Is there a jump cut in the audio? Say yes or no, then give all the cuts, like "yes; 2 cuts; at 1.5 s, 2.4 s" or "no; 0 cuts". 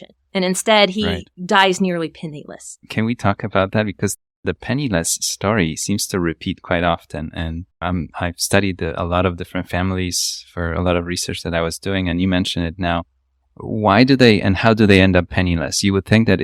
no; 0 cuts